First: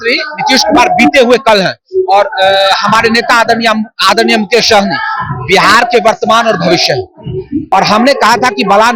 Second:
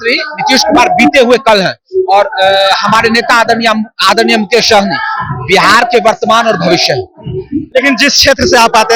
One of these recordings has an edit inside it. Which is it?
first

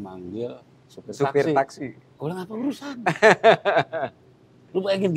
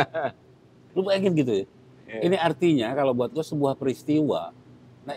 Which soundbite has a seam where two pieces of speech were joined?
first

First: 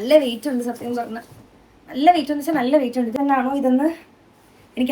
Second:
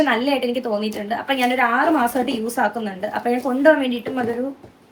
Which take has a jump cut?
first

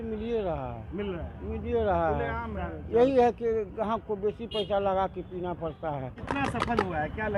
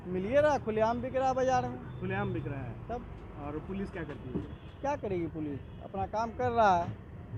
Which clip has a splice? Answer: first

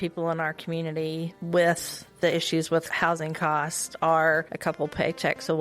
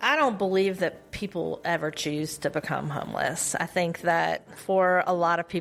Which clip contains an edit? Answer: first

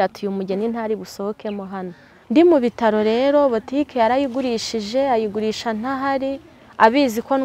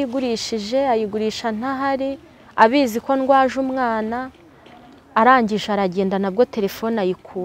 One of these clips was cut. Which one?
first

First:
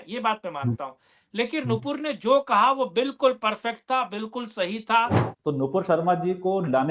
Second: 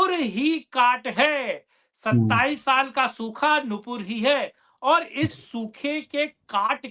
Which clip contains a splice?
first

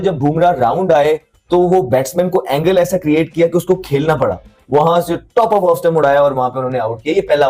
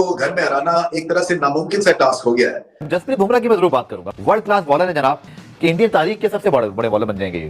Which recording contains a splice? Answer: second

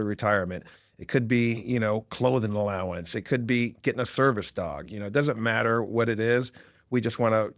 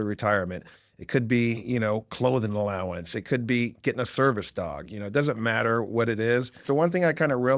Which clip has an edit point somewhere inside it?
second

